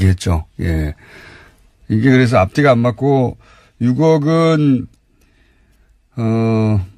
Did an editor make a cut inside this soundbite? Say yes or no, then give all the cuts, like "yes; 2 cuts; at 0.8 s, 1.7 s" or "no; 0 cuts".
no; 0 cuts